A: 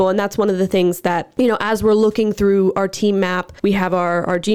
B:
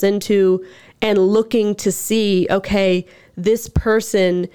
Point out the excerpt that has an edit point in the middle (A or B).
A